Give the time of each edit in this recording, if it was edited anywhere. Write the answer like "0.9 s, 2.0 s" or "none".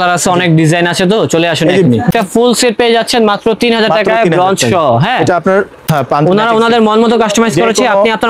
2.1 s, 5.9 s